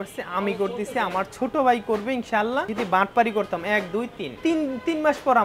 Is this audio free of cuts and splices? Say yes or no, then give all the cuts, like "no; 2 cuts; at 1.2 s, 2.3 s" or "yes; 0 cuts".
no; 2 cuts; at 2.7 s, 4.3 s